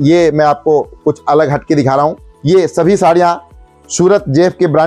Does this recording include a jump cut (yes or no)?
yes